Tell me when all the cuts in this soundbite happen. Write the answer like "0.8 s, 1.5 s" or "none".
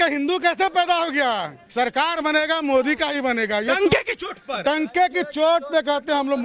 1.6 s